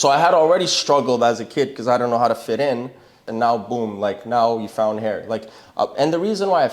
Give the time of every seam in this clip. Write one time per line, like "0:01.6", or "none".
0:03.2